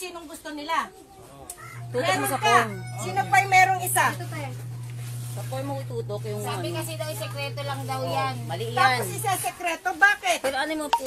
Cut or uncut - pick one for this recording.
uncut